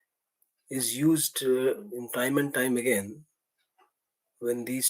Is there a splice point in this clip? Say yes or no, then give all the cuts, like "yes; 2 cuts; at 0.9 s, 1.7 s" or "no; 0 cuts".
no; 0 cuts